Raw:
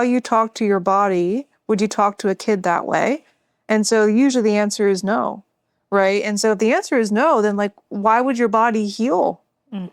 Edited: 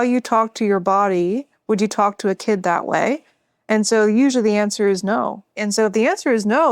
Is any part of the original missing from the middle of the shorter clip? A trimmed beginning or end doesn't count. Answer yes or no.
yes